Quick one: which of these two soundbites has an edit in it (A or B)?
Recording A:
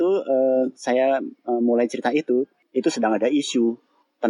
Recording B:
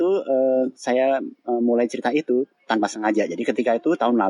A